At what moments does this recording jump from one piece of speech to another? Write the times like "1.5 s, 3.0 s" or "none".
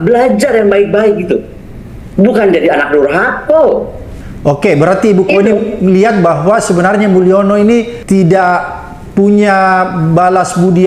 none

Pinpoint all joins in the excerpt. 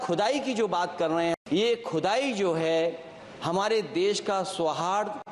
1.4 s

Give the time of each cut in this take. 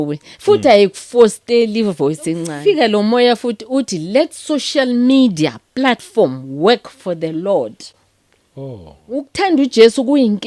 2.5 s, 9.3 s

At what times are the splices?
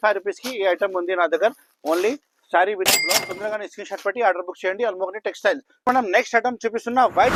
none

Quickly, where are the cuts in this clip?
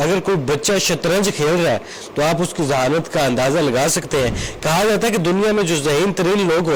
none

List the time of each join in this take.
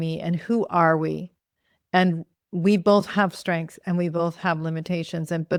none

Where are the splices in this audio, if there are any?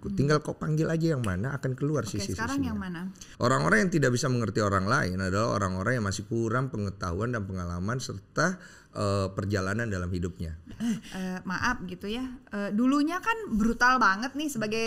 3.2 s, 10.7 s

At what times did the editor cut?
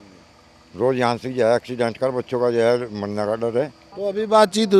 3.8 s

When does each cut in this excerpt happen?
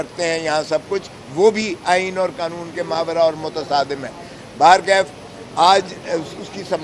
none

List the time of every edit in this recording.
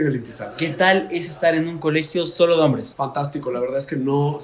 2.9 s

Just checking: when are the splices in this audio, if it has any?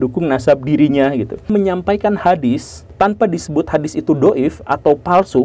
1.5 s, 2.8 s

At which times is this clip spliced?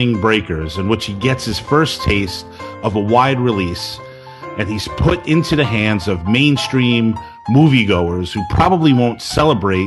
none

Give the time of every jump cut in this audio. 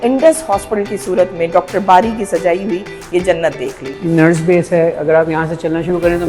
4.0 s

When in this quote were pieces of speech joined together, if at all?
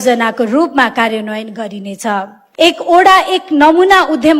2.4 s

